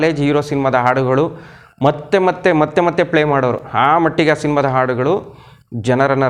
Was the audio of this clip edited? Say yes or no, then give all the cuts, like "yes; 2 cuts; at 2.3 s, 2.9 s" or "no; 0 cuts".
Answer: no; 0 cuts